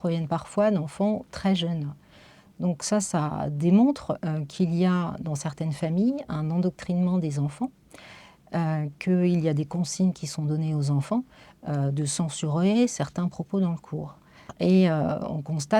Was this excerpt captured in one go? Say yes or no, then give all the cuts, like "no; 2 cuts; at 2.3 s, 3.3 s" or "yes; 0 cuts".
no; 1 cut; at 14.5 s